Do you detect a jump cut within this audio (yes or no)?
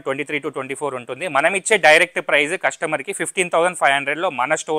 no